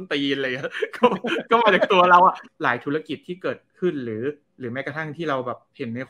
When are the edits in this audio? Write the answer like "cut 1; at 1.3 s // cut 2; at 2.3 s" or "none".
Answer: cut 1; at 2.5 s // cut 2; at 4.5 s